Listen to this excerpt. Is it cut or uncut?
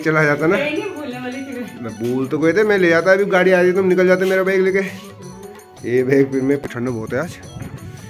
cut